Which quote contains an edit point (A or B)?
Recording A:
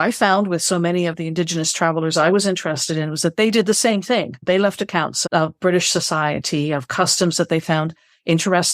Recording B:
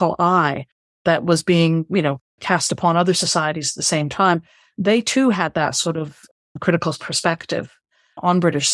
A